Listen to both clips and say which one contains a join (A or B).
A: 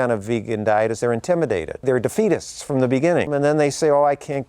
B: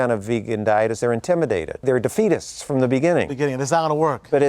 A